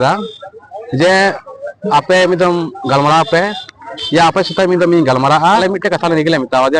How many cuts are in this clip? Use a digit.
1